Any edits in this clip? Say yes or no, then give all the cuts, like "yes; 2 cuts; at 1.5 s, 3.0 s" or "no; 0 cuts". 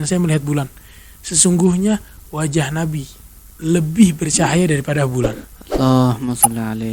no; 0 cuts